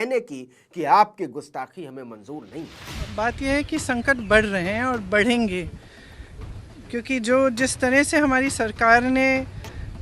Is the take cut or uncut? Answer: uncut